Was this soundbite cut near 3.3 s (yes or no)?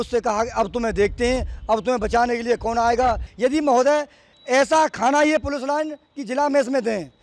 yes